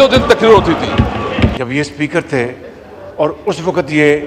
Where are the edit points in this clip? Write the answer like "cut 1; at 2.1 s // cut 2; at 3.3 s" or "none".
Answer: cut 1; at 1.6 s